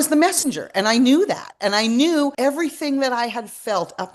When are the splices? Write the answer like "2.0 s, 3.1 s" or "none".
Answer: 2.3 s

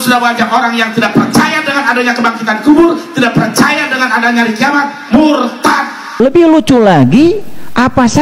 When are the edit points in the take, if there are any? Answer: 6.2 s

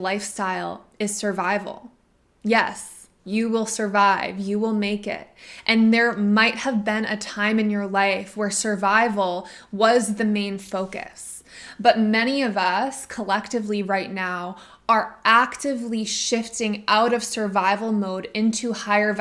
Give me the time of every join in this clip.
none

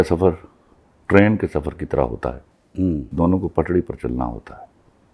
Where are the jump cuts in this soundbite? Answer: 3.1 s

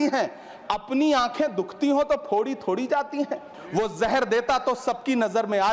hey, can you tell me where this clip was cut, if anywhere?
3.5 s

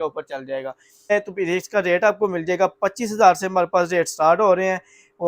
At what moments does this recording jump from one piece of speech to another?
1.1 s

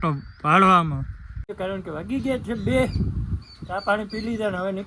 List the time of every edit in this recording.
1.5 s

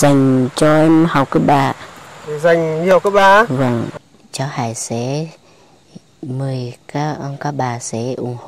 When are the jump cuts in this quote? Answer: 4.0 s

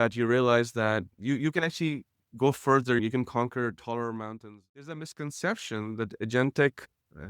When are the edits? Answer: 1.1 s, 4.3 s

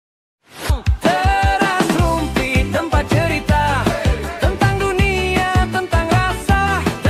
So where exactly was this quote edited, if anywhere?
none

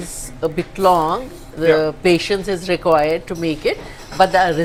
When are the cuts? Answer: none

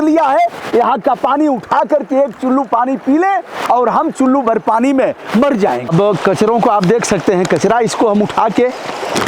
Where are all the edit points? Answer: 5.9 s

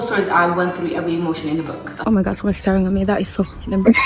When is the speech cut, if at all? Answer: 1.8 s

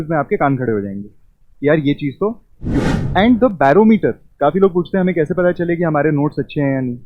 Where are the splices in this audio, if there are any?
2.9 s

